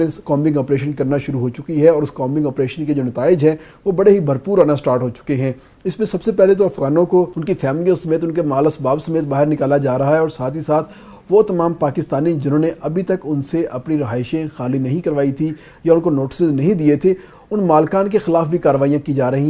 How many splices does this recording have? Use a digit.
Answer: 0